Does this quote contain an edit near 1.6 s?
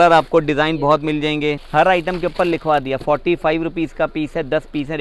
yes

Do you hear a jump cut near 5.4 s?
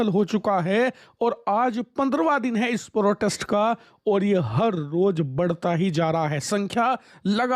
no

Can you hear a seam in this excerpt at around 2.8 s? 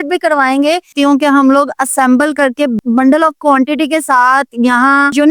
yes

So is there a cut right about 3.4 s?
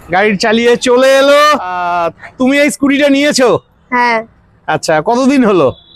no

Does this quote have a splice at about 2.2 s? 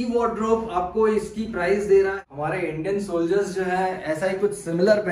yes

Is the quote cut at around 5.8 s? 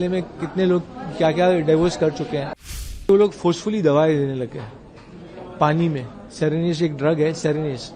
no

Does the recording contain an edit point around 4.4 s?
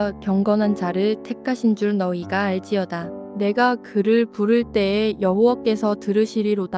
no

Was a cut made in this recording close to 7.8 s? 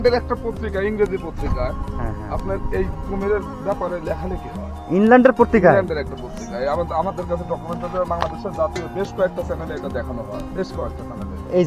no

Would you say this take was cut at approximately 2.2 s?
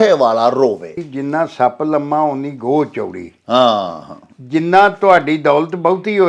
no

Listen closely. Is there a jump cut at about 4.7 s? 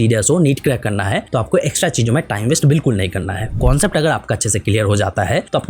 no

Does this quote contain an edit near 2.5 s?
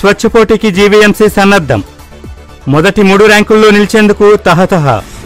no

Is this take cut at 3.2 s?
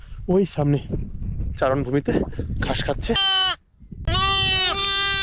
yes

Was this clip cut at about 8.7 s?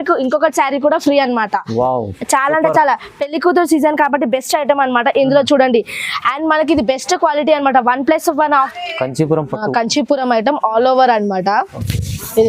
yes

